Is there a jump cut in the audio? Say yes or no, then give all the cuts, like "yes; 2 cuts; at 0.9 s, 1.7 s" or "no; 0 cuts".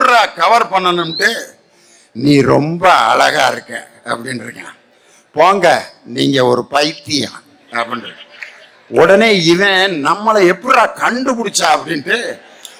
no; 0 cuts